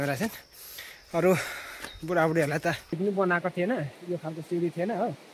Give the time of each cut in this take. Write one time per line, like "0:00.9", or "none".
0:03.0